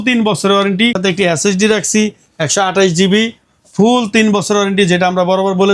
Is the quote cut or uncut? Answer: cut